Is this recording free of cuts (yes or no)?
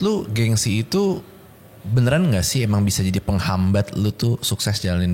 yes